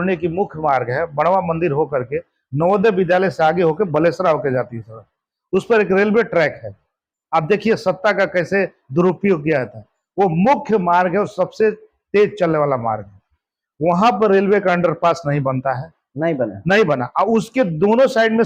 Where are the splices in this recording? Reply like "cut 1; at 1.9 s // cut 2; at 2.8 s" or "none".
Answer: none